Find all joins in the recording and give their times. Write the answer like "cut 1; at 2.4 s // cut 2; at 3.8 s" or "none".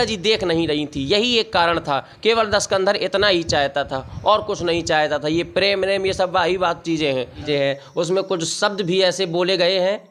cut 1; at 7.4 s